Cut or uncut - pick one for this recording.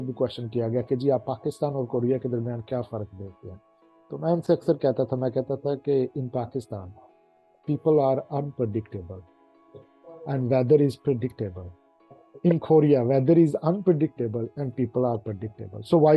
uncut